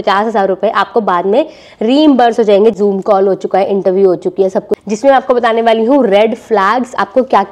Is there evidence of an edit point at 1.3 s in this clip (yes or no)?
no